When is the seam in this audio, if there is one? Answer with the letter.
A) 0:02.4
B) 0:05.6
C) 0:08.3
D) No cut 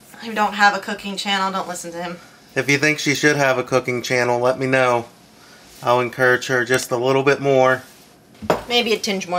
C